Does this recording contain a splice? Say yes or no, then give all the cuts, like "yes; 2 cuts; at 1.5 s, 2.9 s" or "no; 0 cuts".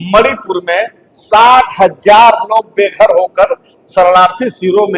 no; 0 cuts